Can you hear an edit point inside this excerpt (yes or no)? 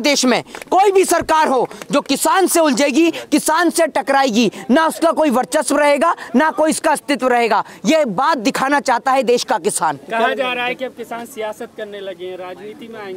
no